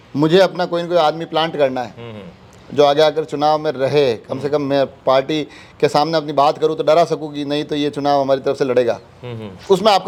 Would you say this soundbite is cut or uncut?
uncut